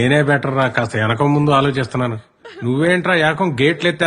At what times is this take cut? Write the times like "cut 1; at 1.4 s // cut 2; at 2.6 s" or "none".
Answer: none